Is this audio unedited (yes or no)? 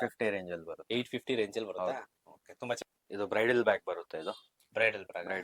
yes